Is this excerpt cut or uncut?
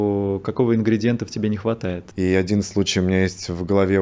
cut